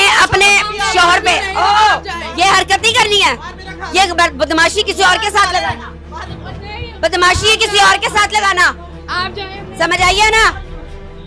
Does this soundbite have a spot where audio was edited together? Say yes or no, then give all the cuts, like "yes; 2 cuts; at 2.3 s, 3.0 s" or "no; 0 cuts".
no; 0 cuts